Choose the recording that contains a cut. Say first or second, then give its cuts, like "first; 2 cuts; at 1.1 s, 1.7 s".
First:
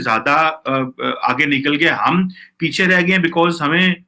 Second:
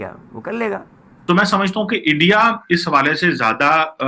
second; 1 cut; at 1.1 s